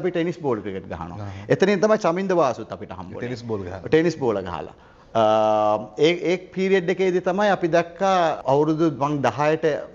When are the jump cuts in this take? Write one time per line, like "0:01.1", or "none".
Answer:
none